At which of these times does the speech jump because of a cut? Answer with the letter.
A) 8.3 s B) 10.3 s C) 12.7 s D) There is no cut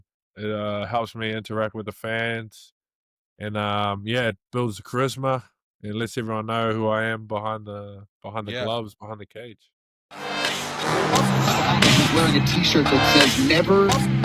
B